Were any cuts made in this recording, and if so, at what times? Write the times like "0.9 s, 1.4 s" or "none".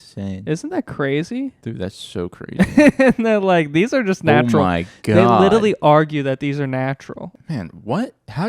7.3 s